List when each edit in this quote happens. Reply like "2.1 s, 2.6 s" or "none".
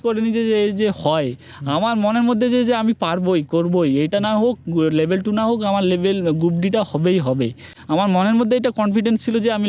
none